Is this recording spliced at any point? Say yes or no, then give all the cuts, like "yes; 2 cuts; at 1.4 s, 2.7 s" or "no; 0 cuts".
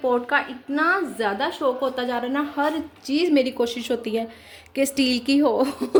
no; 0 cuts